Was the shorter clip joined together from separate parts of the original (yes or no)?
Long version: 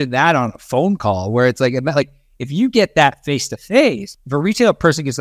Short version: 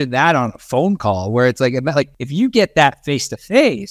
yes